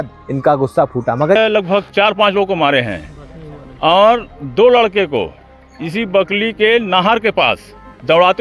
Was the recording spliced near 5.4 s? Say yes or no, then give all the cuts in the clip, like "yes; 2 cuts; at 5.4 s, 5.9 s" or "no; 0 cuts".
no; 1 cut; at 1.4 s